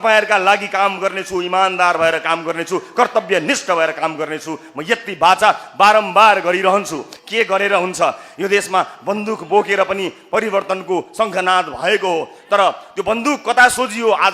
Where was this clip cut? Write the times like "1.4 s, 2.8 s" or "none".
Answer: 7.1 s

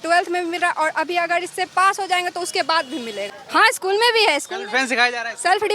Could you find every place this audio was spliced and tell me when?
3.3 s

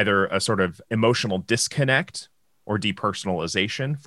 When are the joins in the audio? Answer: none

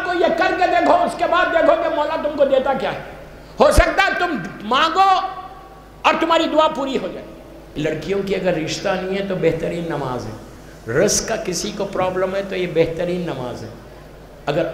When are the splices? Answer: 7.8 s

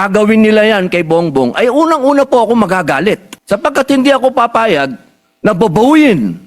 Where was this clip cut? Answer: 3.3 s

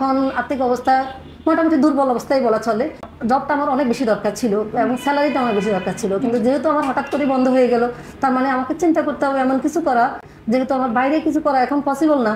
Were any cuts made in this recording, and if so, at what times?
none

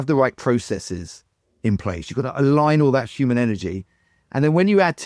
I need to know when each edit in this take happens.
none

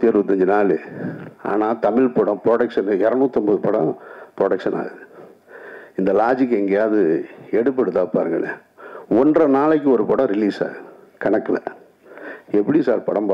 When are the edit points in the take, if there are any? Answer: none

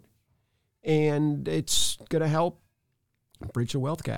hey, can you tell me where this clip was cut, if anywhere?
none

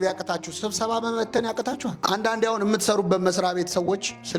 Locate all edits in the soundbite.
2.0 s

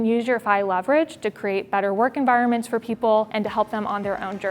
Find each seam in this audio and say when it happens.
3.3 s

